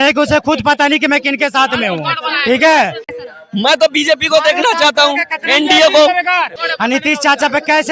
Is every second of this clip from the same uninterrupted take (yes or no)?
no